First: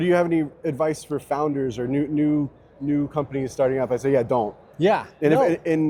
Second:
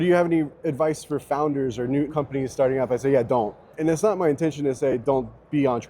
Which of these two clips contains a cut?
second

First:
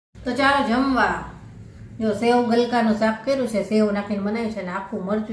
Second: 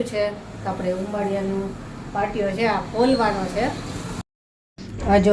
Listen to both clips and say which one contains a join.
second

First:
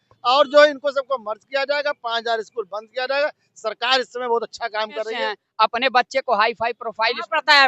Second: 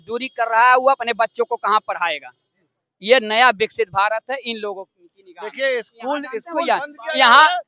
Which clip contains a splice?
first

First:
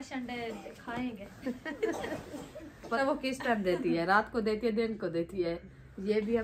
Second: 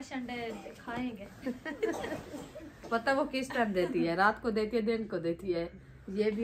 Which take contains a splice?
first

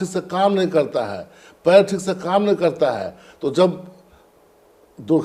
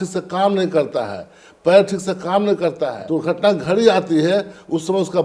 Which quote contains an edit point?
second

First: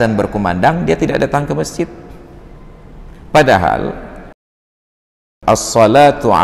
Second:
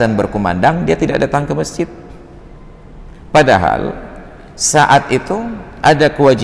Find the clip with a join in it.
first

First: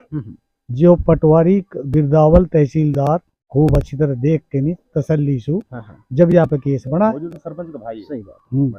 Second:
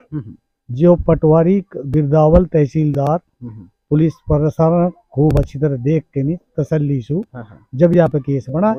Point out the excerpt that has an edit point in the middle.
first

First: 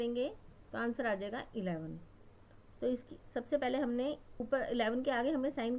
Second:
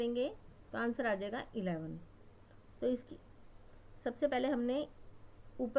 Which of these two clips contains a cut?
first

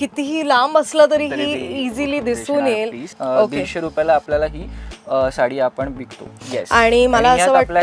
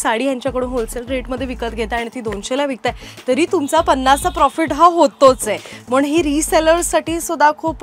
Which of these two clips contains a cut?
first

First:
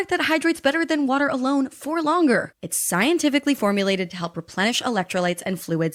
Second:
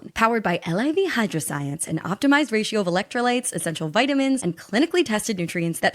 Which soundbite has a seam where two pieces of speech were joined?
second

